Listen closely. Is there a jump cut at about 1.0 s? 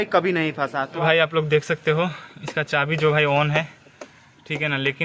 yes; 1 cut; at 1.0 s

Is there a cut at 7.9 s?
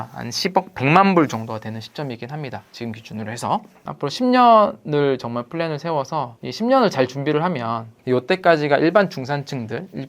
yes; 2 cuts; at 3.8 s, 7.9 s

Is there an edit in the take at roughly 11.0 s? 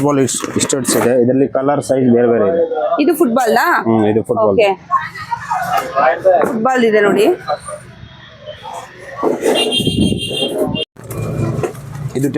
yes; 1 cut; at 11.0 s

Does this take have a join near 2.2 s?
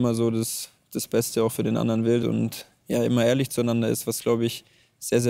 yes; 1 cut; at 2.2 s

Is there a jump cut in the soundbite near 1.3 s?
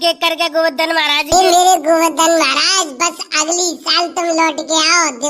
yes; 1 cut; at 1.3 s

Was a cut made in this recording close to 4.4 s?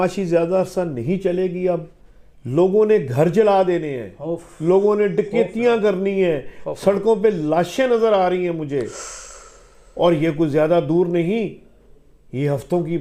no; 0 cuts

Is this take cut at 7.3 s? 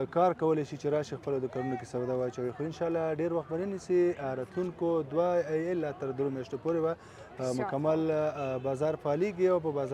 no; 0 cuts

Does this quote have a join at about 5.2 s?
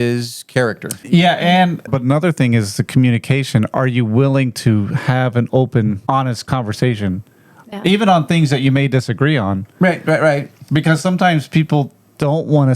no; 3 cuts; at 0.9 s, 1.9 s, 6.4 s

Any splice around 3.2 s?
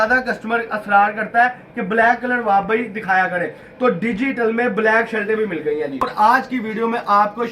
no; 1 cut; at 6.1 s

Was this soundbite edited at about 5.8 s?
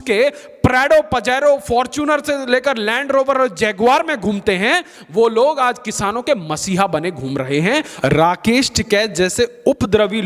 no; 1 cut; at 7.9 s

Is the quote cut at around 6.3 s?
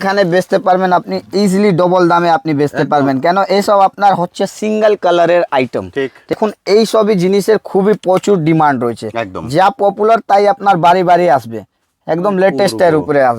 yes; 1 cut; at 6.3 s

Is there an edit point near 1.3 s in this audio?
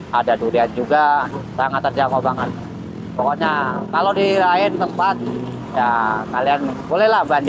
yes; 1 cut; at 1.3 s

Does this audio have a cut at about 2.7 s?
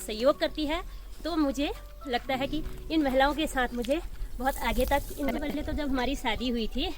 no; 1 cut; at 5.4 s

